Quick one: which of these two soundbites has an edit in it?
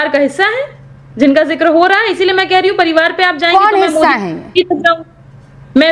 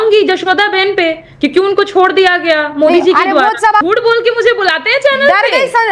second; 1 cut; at 3.8 s

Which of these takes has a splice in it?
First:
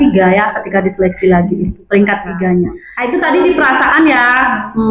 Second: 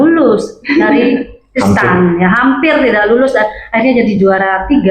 first; 1 cut; at 2.9 s

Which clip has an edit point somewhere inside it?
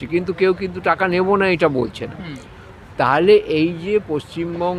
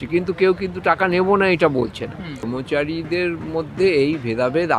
second; 1 cut; at 2.5 s

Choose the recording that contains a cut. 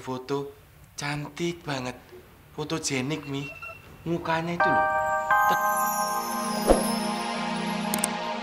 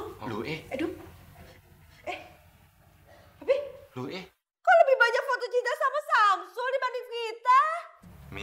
first; 1 cut; at 4.6 s

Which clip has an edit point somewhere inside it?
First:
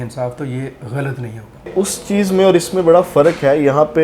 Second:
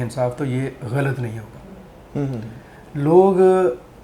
first; 1 cut; at 1.7 s

